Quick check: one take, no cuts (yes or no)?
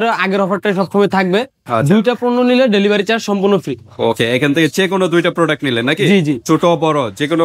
yes